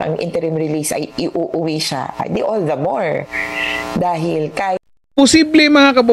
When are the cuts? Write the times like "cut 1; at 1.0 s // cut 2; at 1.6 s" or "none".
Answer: cut 1; at 4.8 s